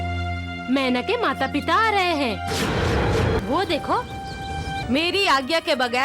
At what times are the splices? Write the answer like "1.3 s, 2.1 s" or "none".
3.4 s, 4.8 s